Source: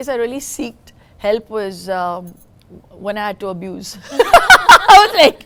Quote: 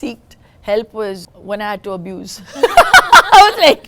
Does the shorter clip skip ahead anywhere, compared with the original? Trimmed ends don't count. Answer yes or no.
yes